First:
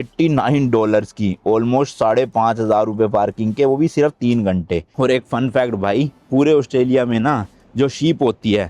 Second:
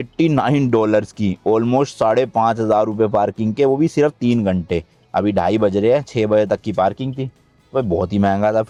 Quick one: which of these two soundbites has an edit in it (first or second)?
first